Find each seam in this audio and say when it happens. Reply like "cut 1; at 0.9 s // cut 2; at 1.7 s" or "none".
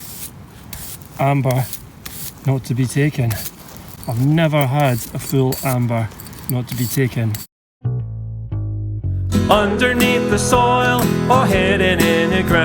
cut 1; at 7.4 s